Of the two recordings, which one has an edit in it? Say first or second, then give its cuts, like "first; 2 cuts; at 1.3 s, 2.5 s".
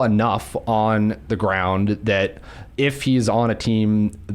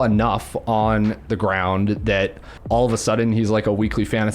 second; 1 cut; at 2.5 s